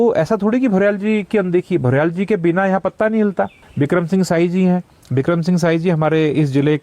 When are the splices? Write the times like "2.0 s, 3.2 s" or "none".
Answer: 3.6 s